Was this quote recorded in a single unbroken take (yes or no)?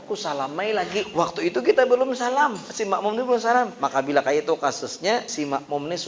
no